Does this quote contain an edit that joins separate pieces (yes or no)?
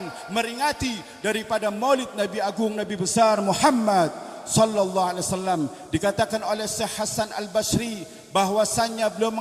no